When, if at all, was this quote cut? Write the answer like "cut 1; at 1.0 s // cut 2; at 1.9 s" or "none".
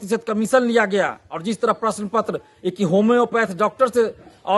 none